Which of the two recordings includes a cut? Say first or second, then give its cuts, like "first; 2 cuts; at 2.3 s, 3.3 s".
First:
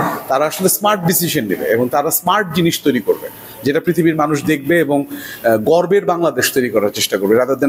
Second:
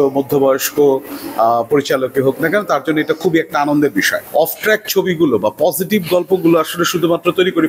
second; 1 cut; at 4.2 s